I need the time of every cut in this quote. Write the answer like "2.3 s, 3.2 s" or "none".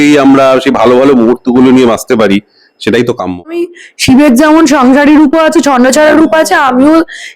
3.8 s

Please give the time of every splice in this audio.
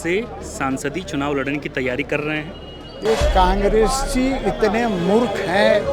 2.9 s

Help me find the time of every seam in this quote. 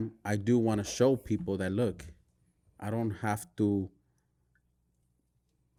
none

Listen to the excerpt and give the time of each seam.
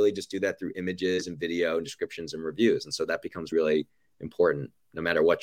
3.5 s

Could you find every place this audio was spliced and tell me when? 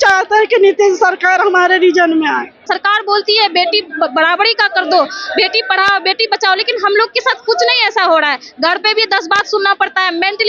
2.6 s

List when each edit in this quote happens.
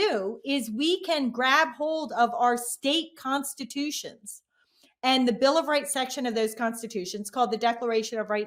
none

